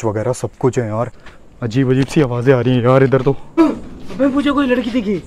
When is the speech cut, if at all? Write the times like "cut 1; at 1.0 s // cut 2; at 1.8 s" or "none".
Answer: cut 1; at 1.3 s // cut 2; at 3.6 s